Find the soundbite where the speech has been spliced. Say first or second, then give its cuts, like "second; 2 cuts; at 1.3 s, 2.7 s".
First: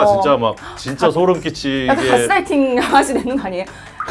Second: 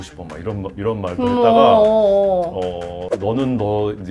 second; 1 cut; at 3.1 s